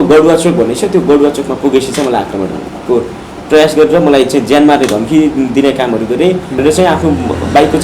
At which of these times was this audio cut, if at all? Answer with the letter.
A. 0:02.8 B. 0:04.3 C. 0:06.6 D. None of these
C